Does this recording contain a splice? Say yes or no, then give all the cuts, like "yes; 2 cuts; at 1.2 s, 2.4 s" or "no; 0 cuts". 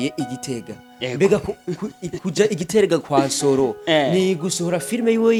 no; 0 cuts